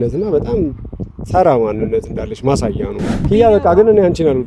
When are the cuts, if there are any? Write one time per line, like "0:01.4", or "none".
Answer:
0:03.2